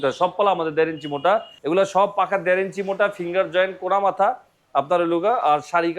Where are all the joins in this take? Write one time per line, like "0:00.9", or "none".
0:01.5